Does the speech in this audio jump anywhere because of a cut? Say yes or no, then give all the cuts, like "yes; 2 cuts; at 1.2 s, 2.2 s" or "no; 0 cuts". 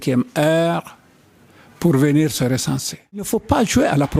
yes; 1 cut; at 3.3 s